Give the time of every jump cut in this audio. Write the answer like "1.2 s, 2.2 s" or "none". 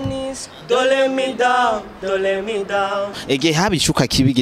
3.2 s